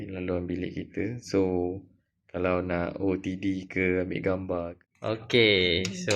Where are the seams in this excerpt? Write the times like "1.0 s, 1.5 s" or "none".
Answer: 4.7 s